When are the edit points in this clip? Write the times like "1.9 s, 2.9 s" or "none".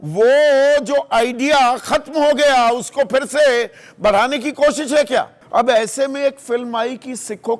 5.4 s